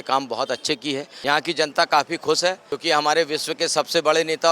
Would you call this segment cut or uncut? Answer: cut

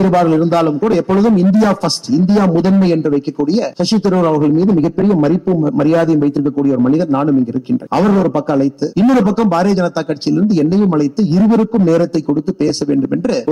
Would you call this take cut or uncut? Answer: uncut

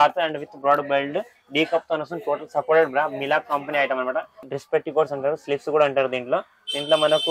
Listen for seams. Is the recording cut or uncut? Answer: cut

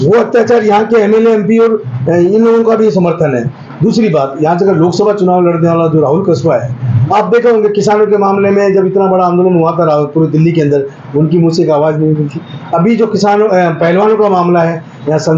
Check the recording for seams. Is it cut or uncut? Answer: uncut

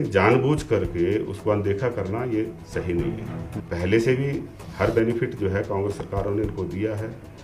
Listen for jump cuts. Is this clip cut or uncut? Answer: cut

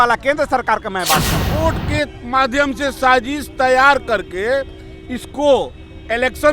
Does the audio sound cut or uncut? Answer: cut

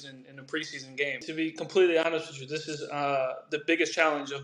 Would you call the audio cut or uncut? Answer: cut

